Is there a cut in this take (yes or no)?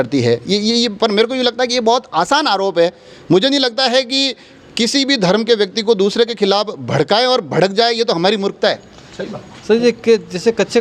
no